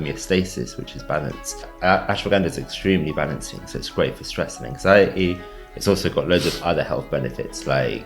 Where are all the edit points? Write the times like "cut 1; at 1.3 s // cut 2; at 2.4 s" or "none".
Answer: cut 1; at 1.7 s